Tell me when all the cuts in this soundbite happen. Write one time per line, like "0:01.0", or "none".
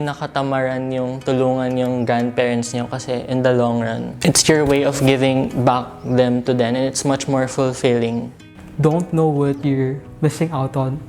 0:04.1
0:08.5